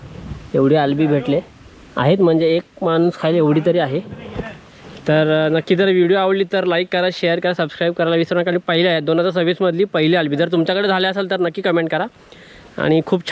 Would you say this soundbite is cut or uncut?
uncut